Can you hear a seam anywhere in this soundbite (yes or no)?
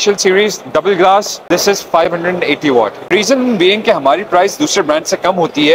yes